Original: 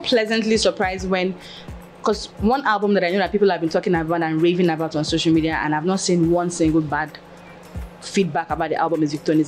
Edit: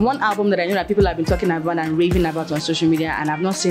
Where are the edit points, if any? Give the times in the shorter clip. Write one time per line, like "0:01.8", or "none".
none